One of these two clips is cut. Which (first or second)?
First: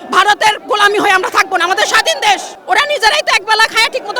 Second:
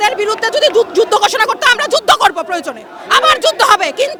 first